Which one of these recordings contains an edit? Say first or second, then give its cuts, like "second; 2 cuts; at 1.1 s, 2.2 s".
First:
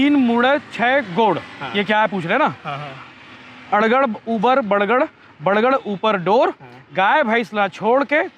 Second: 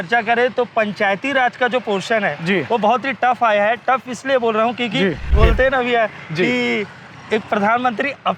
second; 1 cut; at 5.3 s